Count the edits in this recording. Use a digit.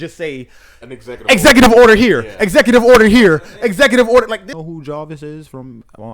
1